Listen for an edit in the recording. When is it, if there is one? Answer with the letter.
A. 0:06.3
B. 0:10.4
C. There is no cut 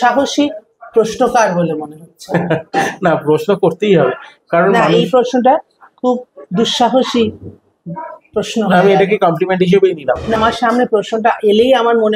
B